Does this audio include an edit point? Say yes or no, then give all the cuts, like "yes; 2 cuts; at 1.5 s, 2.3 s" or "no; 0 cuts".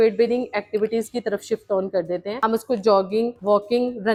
no; 0 cuts